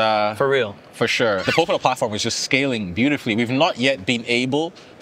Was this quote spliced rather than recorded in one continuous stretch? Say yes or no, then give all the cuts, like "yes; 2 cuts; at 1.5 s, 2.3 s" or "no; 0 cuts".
yes; 1 cut; at 1.5 s